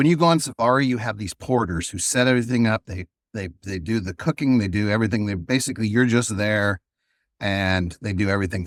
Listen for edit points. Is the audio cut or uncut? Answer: uncut